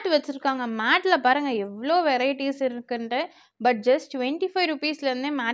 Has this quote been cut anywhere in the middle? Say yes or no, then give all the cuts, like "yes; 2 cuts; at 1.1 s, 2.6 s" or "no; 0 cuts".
no; 0 cuts